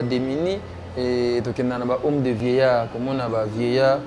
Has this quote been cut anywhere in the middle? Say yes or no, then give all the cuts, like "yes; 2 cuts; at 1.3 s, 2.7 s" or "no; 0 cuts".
yes; 1 cut; at 2.4 s